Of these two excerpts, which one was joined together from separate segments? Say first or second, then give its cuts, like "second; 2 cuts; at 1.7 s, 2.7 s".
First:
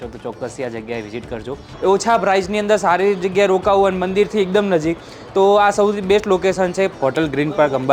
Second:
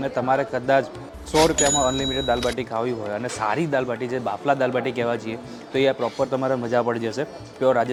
first; 2 cuts; at 1.6 s, 6.9 s